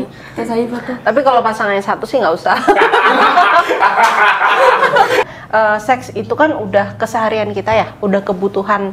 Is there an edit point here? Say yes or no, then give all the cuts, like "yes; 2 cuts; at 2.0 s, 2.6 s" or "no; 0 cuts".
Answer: yes; 1 cut; at 5.3 s